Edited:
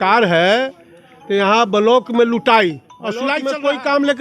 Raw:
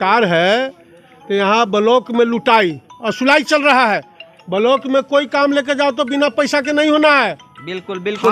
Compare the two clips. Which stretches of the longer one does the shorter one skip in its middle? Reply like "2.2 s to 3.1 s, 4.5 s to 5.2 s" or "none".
3.3 s to 4.8 s